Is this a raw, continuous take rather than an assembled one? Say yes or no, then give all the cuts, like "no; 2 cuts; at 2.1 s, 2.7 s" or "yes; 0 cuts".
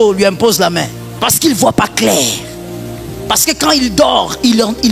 no; 1 cut; at 1.0 s